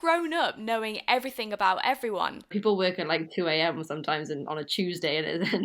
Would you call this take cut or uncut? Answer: cut